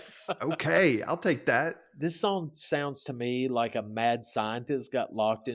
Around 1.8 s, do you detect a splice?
yes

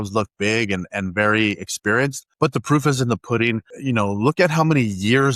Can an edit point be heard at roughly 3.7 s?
yes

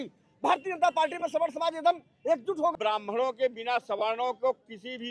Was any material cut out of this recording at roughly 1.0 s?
no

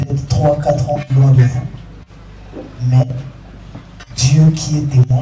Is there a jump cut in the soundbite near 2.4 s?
no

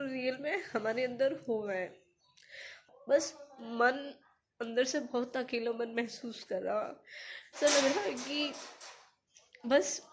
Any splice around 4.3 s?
no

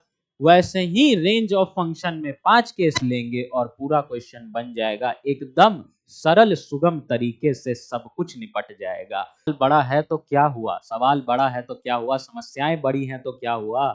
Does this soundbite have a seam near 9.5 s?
yes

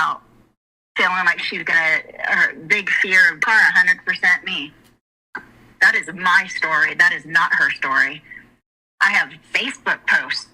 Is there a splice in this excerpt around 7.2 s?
no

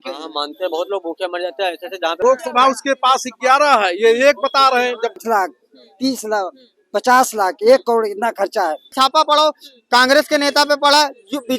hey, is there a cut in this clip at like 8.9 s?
yes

